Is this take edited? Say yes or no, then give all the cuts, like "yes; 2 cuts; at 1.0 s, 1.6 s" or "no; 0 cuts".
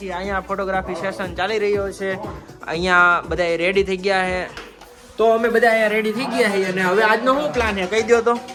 no; 0 cuts